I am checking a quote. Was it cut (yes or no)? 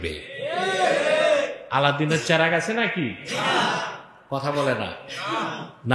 no